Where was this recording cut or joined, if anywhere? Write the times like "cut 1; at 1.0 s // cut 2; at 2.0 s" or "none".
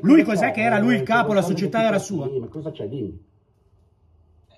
none

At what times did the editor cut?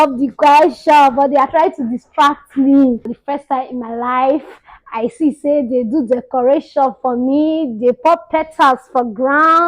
cut 1; at 3.1 s

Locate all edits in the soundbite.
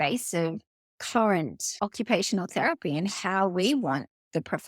cut 1; at 1.6 s

